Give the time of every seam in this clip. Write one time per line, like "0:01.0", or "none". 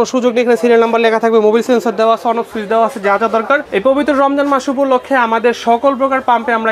0:03.7